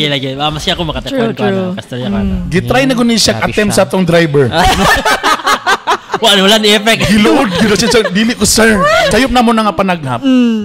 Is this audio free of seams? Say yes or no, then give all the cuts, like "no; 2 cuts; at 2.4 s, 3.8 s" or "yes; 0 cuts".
no; 1 cut; at 9.1 s